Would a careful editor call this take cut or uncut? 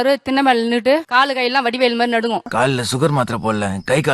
cut